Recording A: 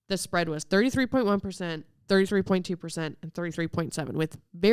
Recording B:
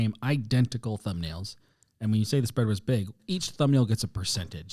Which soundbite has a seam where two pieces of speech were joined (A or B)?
B